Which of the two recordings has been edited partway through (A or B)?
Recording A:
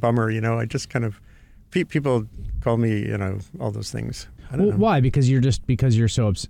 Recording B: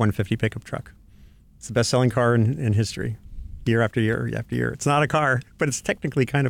A